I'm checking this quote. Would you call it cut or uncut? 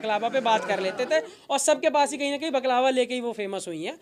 uncut